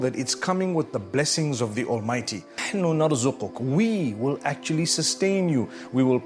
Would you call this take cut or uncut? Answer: cut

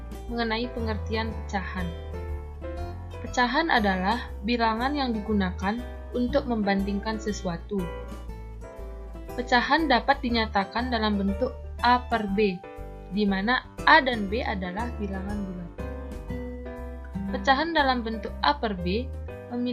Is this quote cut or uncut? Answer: cut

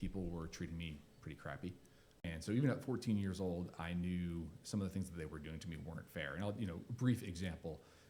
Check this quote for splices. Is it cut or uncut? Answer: cut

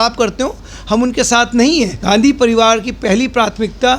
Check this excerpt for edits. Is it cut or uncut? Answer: cut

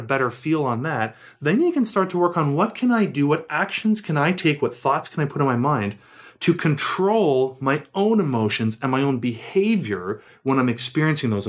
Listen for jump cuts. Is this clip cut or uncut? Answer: uncut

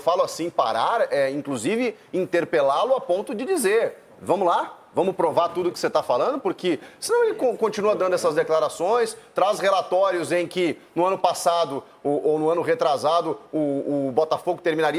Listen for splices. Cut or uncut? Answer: uncut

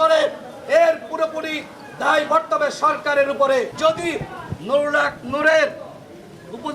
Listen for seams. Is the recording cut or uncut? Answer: cut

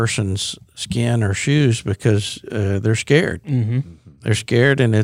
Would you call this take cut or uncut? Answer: uncut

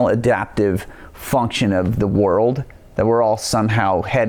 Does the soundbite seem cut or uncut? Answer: uncut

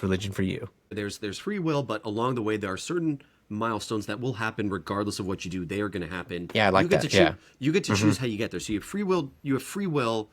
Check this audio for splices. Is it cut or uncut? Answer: cut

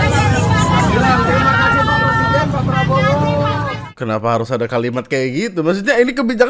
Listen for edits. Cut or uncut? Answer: cut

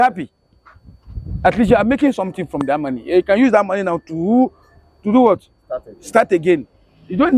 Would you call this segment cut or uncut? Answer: uncut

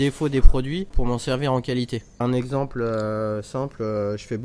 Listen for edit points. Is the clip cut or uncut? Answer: cut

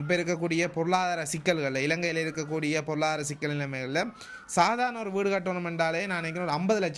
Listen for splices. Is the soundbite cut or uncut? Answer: uncut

